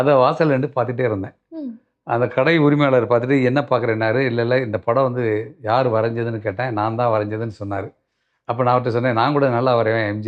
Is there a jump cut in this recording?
no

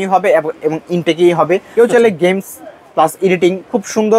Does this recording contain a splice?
yes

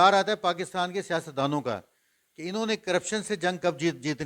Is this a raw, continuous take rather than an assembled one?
yes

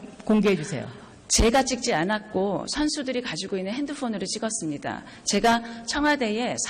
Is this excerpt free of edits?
no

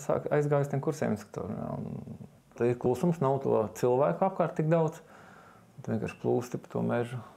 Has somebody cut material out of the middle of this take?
yes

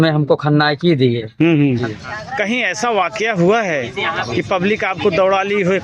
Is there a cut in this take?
yes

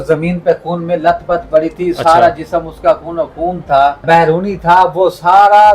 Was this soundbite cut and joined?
yes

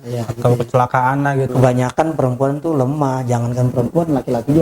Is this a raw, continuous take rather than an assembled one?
no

